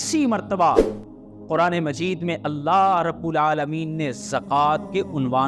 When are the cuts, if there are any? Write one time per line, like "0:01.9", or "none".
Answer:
none

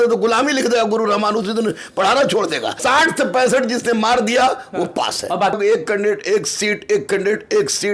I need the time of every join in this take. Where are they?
0:02.8
0:05.5

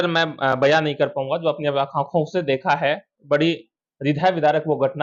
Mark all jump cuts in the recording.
none

